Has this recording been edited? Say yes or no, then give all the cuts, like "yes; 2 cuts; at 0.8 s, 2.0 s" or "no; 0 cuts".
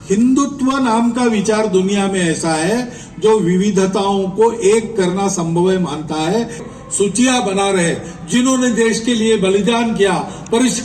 yes; 1 cut; at 6.6 s